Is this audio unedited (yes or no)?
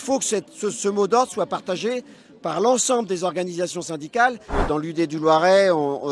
no